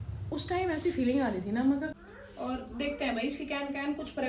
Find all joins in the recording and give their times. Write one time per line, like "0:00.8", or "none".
0:02.0